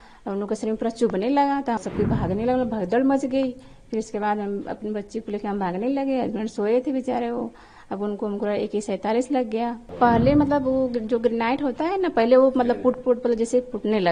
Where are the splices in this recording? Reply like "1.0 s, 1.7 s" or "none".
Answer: 1.8 s, 9.9 s